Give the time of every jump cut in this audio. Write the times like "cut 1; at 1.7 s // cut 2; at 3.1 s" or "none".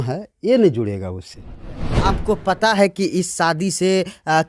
cut 1; at 1.9 s